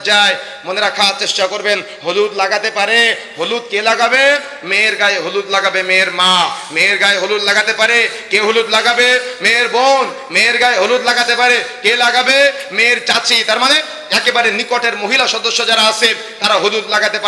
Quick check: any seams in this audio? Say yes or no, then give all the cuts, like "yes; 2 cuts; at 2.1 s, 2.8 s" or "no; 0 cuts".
no; 0 cuts